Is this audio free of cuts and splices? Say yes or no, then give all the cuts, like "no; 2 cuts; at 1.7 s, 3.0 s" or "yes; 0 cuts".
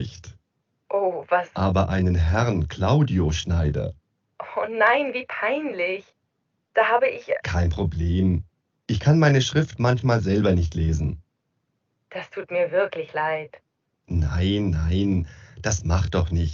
yes; 0 cuts